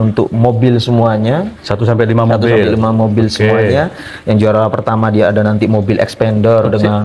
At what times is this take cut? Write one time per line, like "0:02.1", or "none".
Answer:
none